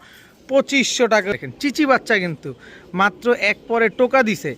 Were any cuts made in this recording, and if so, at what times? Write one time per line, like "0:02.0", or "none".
0:01.3